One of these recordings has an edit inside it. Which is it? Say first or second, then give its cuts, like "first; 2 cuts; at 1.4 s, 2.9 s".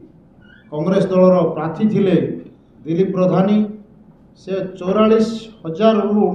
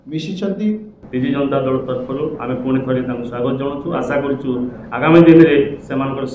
second; 1 cut; at 1.0 s